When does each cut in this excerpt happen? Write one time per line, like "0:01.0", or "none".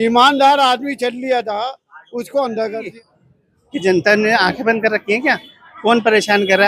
0:02.9